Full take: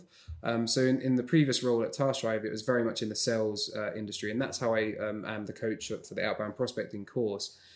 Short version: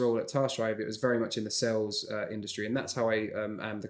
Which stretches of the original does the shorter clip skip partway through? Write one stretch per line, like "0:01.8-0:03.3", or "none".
none